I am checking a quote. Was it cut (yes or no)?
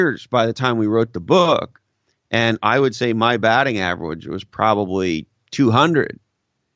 no